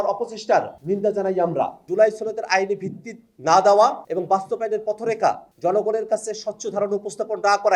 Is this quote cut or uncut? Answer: cut